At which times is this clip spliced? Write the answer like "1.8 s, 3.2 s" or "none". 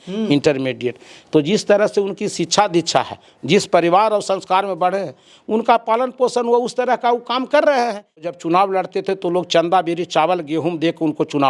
8.4 s